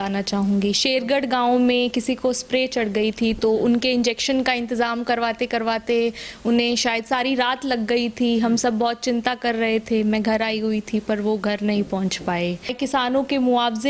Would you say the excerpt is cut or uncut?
cut